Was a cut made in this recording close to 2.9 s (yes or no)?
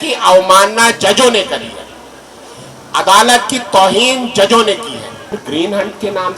no